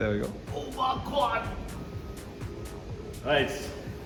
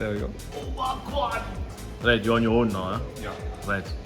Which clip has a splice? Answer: second; 1 cut; at 1.8 s

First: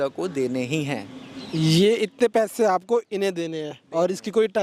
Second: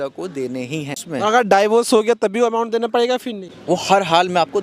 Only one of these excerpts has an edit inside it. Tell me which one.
second; 2 cuts; at 1.0 s, 3.5 s

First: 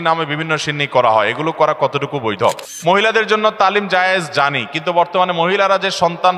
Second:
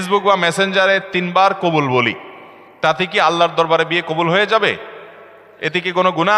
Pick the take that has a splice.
first; 1 cut; at 2.7 s

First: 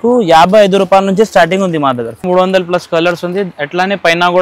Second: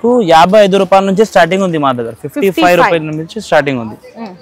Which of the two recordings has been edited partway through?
first; 1 cut; at 2.2 s

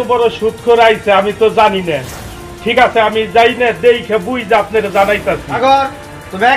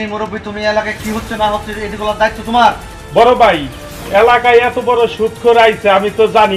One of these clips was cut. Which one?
second; 1 cut; at 3.0 s

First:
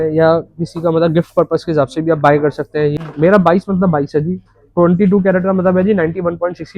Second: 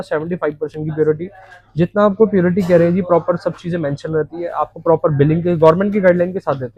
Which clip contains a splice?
first; 1 cut; at 3.0 s

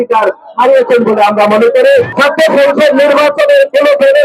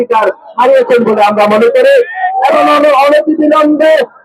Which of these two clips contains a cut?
first; 1 cut; at 2.1 s

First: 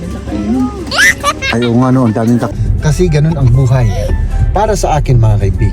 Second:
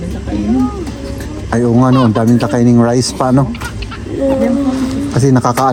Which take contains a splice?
first; 1 cut; at 2.5 s

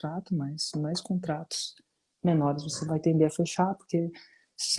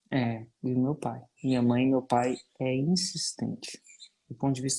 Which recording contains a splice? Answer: second; 1 cut; at 1.3 s

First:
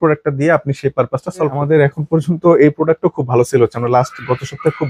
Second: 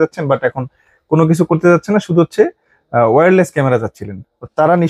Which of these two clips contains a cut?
first; 1 cut; at 1.6 s

